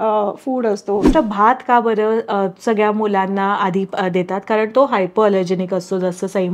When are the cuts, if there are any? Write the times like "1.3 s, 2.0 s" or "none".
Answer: 1.1 s